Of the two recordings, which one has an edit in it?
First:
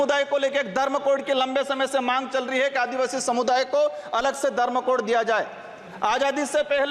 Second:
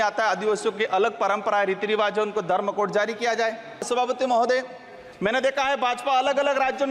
second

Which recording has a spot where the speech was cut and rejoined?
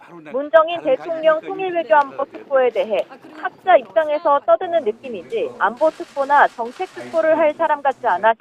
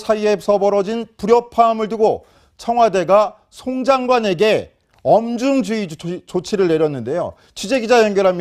first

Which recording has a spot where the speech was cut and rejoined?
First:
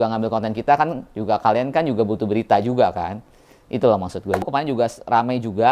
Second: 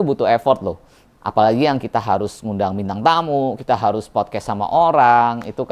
first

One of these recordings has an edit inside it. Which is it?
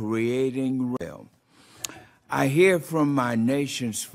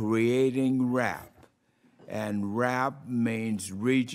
second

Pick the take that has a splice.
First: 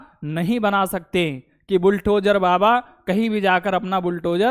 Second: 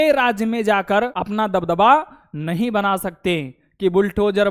second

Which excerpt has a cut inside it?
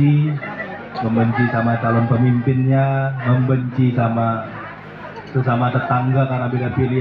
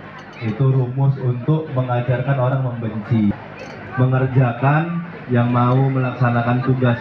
second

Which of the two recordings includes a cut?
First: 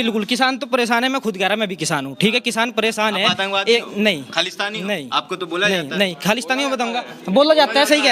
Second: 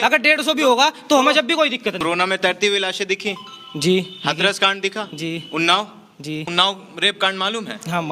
second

